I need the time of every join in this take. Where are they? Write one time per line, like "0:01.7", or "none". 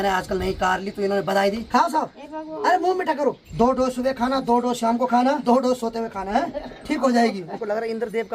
0:01.6
0:03.4
0:05.4
0:07.5